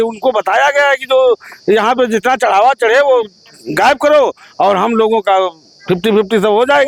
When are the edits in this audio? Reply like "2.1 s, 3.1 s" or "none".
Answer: none

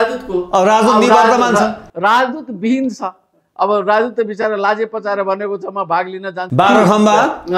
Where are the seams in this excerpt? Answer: 6.4 s

